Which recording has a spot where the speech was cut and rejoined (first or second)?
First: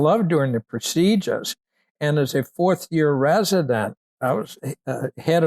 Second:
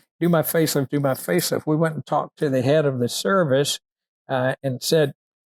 first